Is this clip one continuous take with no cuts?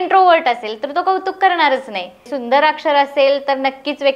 no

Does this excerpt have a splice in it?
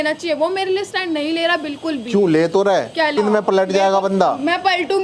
yes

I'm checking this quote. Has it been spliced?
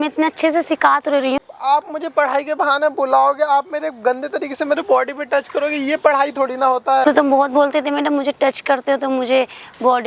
yes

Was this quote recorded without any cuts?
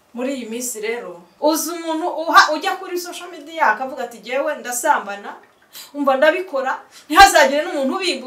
no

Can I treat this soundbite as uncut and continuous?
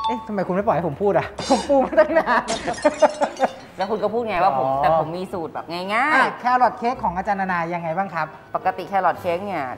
yes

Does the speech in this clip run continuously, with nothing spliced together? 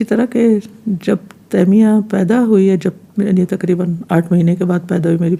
yes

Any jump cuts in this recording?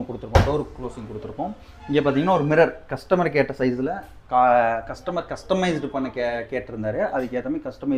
no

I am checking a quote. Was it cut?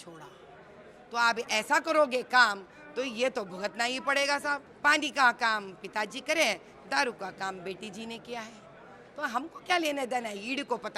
yes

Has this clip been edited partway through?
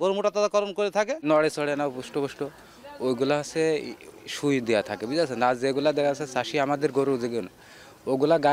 no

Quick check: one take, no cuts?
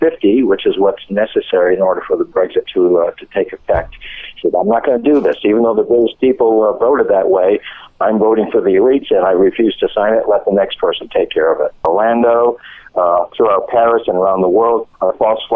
no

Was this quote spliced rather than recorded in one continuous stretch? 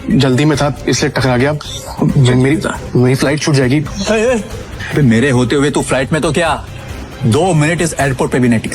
yes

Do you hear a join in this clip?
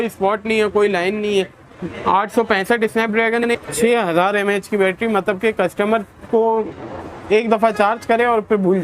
yes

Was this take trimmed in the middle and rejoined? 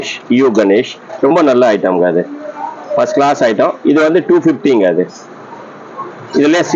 no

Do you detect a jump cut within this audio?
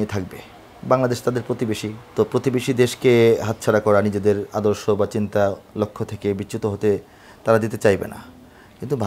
yes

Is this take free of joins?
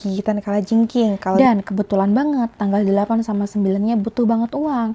no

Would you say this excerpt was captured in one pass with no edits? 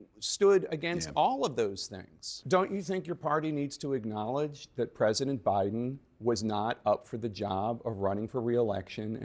no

